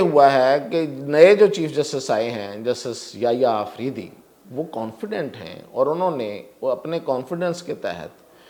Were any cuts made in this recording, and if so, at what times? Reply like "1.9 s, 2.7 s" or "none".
none